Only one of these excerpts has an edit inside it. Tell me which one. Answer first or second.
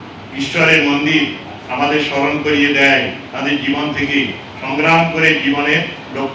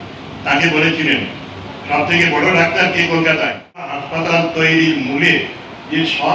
second